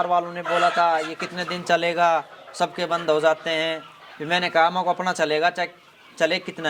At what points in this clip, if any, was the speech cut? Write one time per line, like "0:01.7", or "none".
none